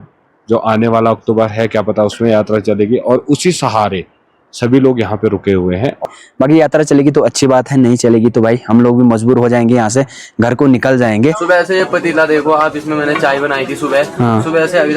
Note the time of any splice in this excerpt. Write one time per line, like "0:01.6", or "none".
0:06.0
0:11.4

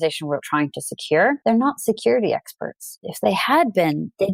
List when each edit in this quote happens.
0:01.4
0:02.9

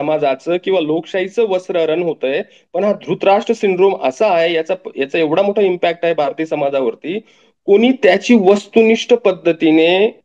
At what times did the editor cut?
none

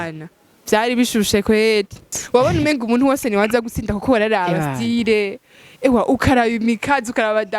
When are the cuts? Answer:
0:02.1

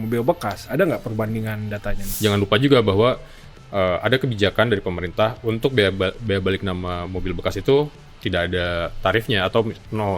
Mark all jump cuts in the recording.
0:02.0

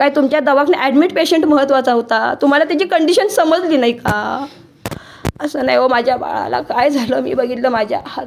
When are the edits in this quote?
none

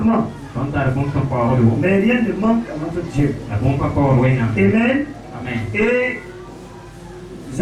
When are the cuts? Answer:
none

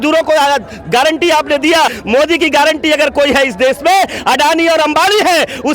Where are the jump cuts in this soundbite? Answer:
0:02.0

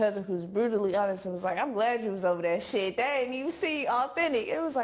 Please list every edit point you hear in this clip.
none

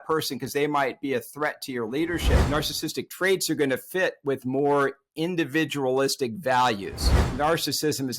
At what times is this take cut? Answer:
0:02.4
0:07.2

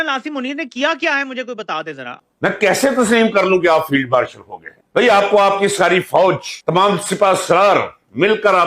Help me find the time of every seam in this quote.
0:02.7

